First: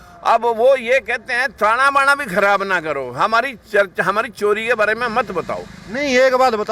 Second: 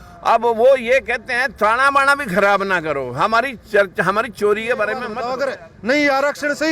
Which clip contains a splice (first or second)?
second